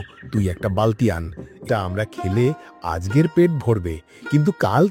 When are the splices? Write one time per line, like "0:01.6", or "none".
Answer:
0:01.5

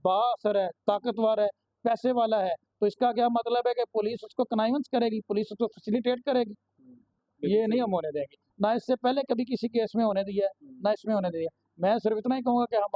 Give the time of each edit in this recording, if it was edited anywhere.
none

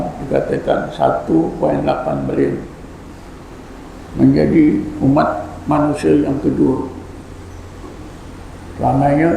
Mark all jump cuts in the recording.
none

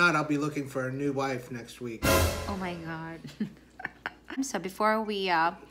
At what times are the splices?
none

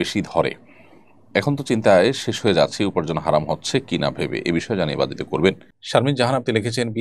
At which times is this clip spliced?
0:05.7

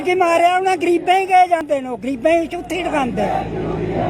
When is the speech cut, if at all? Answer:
0:01.6

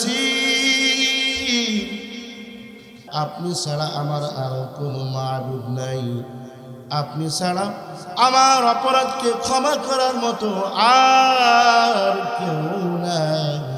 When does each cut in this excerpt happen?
0:03.0

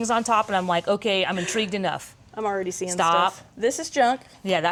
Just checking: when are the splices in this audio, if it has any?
none

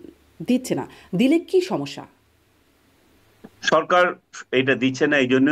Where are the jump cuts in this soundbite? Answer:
none

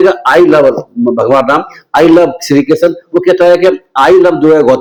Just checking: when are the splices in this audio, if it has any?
none

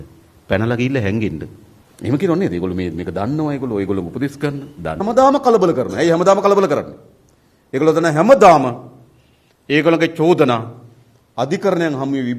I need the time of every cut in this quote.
0:05.0

